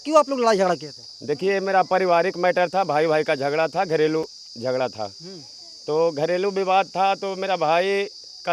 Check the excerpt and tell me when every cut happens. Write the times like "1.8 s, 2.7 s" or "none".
none